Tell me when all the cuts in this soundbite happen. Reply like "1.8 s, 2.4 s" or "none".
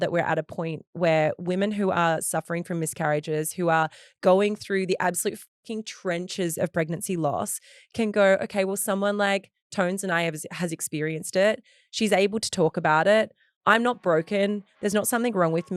none